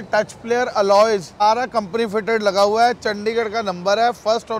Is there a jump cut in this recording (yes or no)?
yes